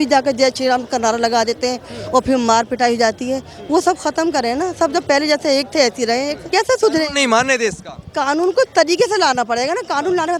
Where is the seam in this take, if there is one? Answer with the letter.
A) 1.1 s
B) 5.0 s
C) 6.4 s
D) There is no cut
C